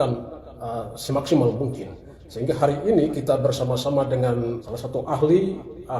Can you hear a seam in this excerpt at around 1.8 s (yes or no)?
no